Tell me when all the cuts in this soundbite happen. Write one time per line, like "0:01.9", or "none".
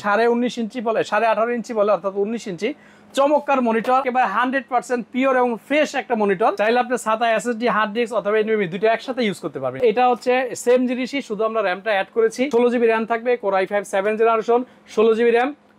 0:04.0
0:06.6
0:09.8
0:12.5